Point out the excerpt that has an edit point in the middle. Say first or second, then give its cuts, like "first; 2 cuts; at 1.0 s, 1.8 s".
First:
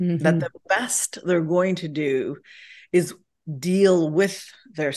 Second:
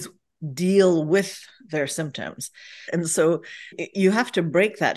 second; 2 cuts; at 2.8 s, 3.8 s